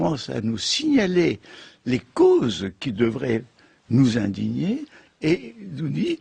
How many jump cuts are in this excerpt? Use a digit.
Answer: 1